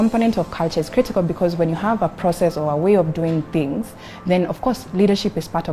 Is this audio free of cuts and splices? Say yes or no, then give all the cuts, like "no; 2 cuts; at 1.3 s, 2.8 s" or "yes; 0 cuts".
yes; 0 cuts